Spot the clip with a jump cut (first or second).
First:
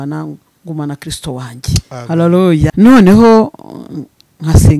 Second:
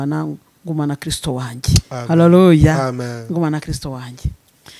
first